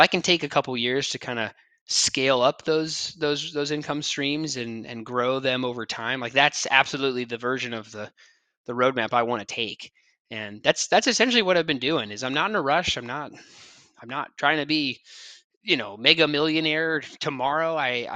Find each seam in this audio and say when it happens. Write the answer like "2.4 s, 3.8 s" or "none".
none